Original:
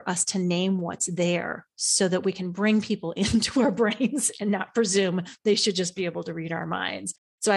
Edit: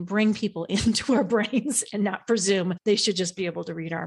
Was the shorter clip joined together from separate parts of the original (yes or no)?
yes